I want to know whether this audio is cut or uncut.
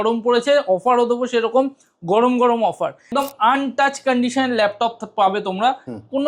cut